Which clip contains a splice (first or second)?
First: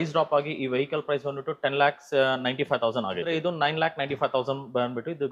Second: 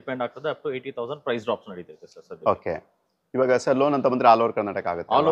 first